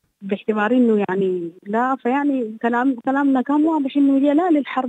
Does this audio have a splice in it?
no; 0 cuts

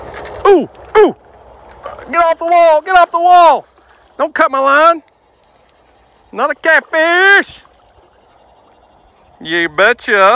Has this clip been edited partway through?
no; 0 cuts

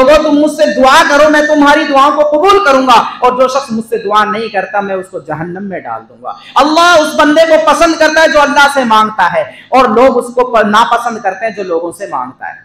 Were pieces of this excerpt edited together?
no; 0 cuts

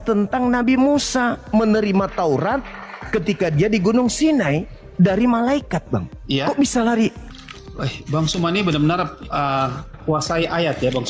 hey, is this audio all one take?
no; 1 cut; at 7.2 s

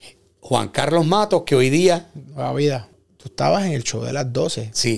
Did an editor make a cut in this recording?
yes; 1 cut; at 2.9 s

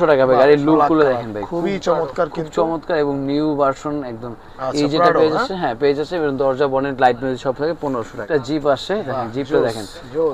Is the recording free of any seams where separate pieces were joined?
no; 1 cut; at 8.2 s

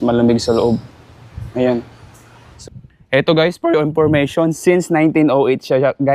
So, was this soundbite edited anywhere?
yes; 1 cut; at 2.5 s

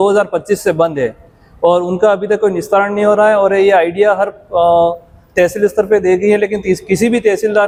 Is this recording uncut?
yes; 0 cuts

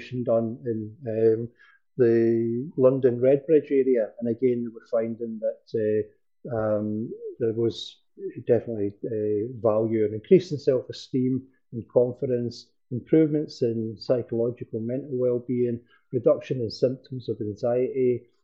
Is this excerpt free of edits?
yes; 0 cuts

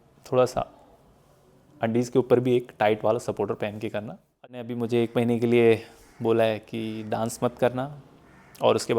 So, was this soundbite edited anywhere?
yes; 1 cut; at 4.6 s

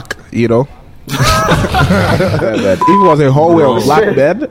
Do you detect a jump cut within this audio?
yes; 1 cut; at 2.5 s

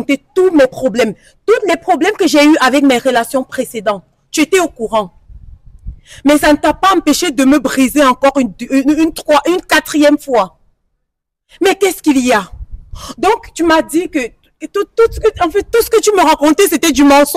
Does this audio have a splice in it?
no; 0 cuts

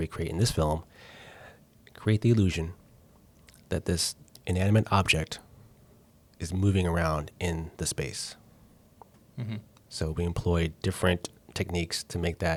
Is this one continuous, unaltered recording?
yes; 0 cuts

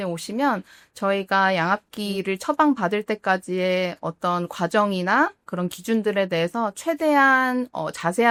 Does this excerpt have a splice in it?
no; 0 cuts

